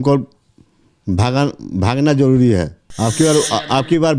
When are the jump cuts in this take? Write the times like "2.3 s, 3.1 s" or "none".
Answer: 2.8 s